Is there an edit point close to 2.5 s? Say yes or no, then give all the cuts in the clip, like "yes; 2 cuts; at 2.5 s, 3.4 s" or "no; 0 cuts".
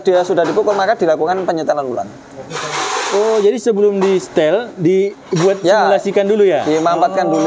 no; 0 cuts